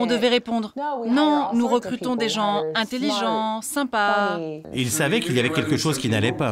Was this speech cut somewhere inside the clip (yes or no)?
yes